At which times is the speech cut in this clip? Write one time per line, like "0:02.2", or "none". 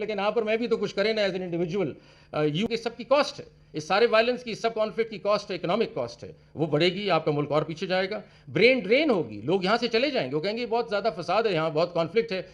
0:02.7